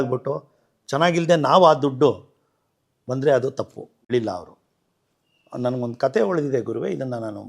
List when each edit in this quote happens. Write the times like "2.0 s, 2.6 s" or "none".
4.1 s